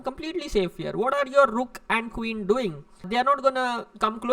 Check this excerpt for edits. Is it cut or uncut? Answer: uncut